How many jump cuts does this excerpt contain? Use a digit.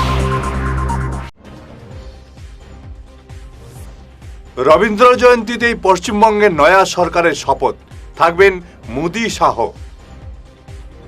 1